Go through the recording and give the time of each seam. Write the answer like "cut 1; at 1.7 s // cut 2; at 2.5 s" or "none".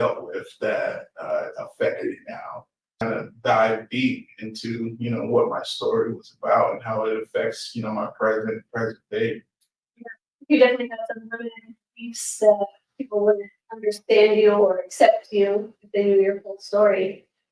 cut 1; at 3.0 s